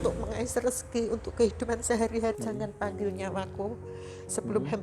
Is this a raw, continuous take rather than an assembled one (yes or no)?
no